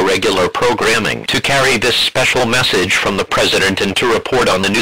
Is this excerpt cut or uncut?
uncut